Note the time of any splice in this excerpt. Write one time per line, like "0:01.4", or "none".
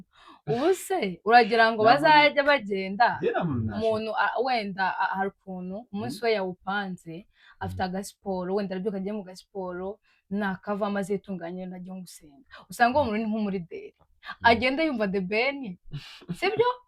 none